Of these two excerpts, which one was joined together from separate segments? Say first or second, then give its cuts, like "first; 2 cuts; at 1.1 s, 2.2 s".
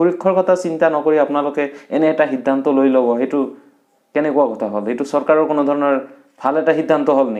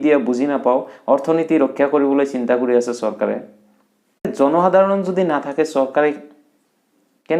second; 1 cut; at 4.3 s